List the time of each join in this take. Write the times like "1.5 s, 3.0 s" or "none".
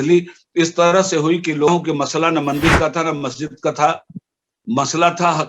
1.7 s